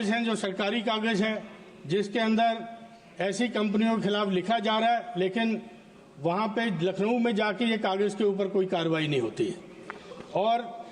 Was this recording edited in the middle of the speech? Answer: no; 0 cuts

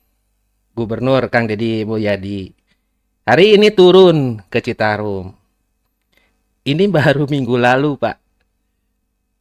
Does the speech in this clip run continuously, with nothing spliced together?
yes; 0 cuts

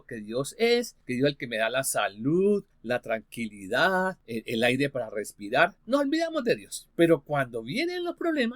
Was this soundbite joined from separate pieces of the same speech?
yes; 5 cuts; at 1.0 s, 2.7 s, 4.2 s, 5.8 s, 6.8 s

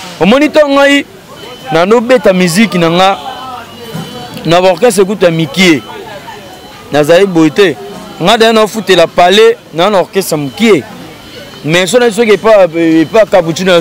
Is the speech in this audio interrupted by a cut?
no; 0 cuts

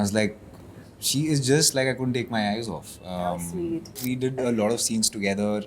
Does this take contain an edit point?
yes; 1 cut; at 4.0 s

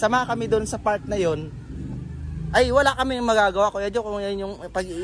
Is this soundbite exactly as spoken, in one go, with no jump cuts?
yes; 0 cuts

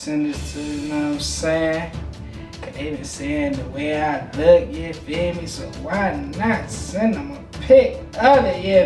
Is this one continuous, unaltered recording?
yes; 0 cuts

